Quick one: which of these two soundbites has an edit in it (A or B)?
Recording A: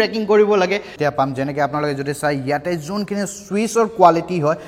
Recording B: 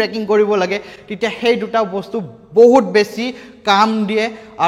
A